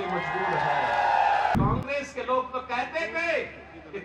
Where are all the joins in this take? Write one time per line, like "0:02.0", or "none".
0:01.5